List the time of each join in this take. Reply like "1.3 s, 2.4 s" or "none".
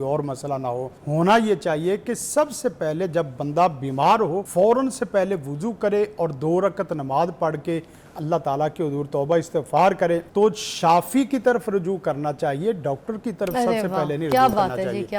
1.0 s, 4.4 s, 10.3 s

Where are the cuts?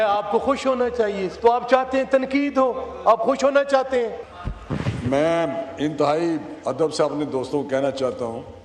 1.3 s, 4.3 s

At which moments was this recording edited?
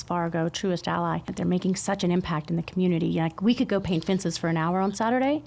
1.3 s

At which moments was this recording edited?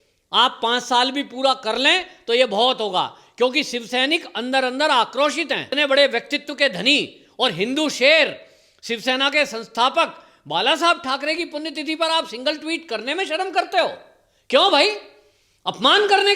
5.7 s

